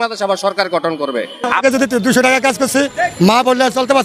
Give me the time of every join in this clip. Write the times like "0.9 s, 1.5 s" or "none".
1.7 s